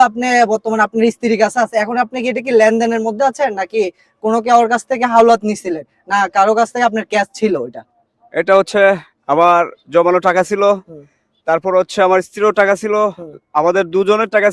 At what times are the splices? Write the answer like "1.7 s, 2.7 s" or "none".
none